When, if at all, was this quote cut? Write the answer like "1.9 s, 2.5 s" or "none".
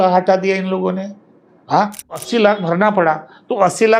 2.2 s